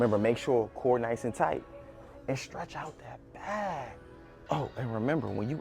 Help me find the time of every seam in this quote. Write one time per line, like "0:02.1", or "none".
0:04.4